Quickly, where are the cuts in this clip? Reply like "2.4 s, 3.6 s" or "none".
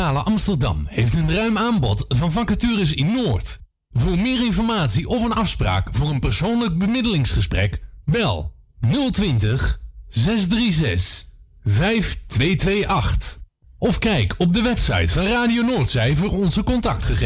none